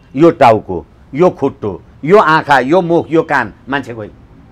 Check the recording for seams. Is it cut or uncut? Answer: uncut